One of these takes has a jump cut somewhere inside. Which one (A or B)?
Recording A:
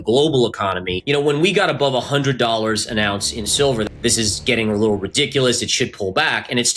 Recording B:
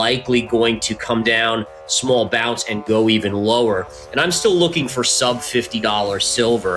A